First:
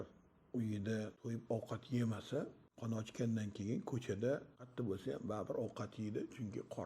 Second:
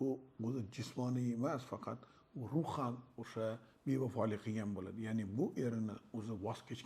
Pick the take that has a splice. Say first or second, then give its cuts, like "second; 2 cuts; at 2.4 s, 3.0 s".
first; 3 cuts; at 1.2 s, 2.7 s, 4.6 s